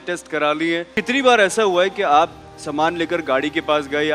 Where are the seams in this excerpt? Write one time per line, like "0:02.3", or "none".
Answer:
0:00.9